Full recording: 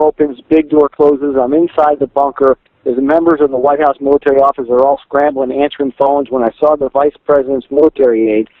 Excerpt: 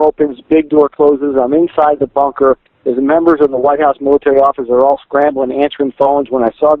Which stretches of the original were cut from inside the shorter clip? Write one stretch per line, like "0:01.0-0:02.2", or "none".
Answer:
none

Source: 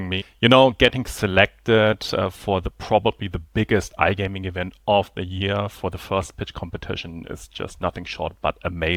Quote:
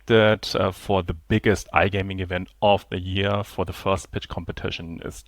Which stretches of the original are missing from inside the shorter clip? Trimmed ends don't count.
0:02.7-0:03.4

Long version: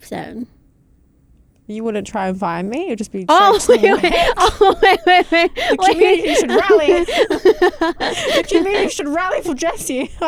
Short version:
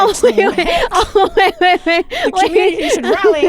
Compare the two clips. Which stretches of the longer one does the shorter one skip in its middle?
none

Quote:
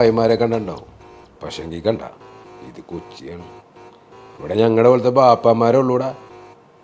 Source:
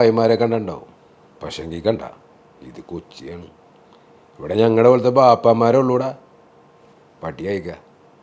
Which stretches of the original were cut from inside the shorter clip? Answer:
none

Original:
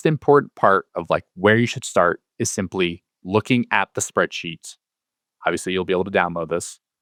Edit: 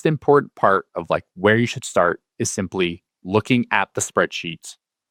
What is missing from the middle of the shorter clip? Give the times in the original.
none

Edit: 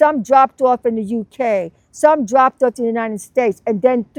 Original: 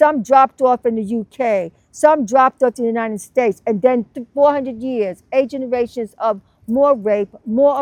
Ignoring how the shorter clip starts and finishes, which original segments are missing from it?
none

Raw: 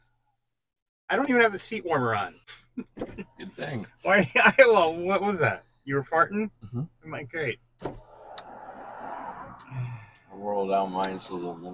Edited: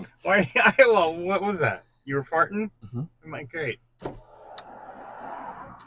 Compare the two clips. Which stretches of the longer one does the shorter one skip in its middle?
none

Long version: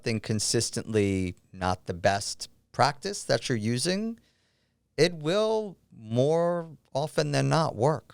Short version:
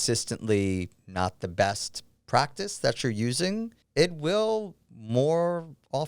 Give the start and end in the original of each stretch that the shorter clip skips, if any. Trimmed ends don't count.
0:04.2-0:04.8

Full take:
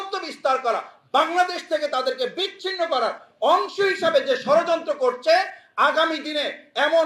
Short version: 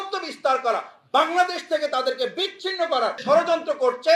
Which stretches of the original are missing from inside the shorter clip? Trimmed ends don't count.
0:03.2-0:04.4

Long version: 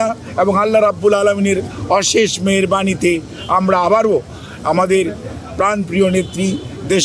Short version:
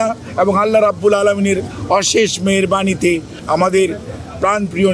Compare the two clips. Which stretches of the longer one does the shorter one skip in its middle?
0:03.3-0:04.5

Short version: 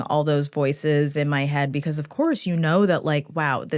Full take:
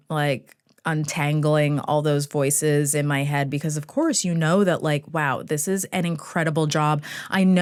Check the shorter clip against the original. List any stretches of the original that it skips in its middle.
none

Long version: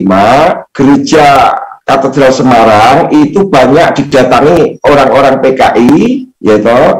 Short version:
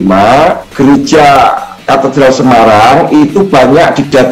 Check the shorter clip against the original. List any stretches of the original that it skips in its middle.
none

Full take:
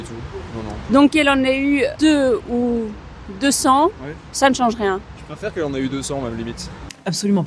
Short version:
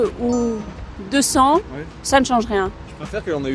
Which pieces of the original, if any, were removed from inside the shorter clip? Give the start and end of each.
none

